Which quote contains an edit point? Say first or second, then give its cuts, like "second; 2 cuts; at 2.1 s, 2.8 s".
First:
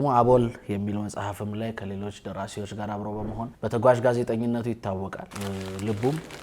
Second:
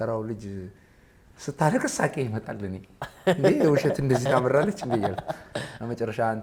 first; 2 cuts; at 3.5 s, 5.3 s